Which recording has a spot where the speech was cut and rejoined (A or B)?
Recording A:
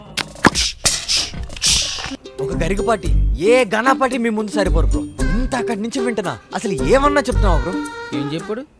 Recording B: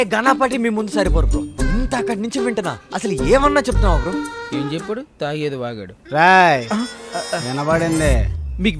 A